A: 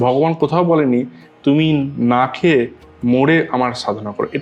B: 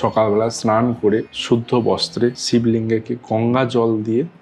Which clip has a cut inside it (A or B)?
B